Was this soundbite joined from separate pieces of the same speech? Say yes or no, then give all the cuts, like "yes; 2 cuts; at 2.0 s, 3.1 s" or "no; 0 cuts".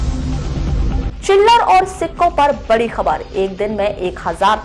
no; 0 cuts